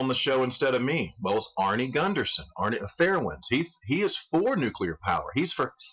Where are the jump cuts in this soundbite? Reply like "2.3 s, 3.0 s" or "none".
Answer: 1.3 s